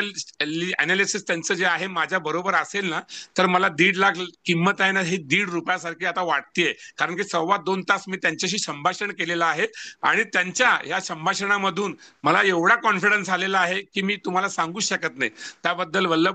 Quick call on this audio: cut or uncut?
uncut